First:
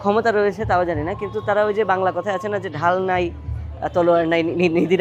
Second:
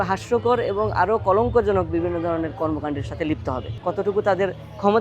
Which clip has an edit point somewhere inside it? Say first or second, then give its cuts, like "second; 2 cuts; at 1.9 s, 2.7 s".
second; 1 cut; at 3.8 s